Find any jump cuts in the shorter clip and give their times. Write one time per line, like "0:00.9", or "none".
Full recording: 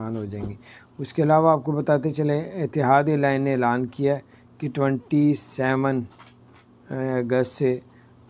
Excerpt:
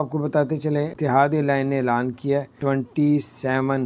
0:00.9
0:02.5